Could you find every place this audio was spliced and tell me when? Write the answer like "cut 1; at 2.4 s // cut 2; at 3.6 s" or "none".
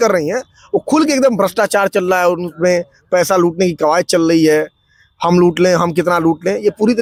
none